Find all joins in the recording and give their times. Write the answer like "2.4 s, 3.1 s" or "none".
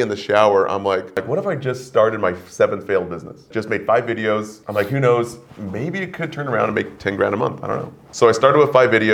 1.2 s, 3.5 s, 4.6 s, 8.0 s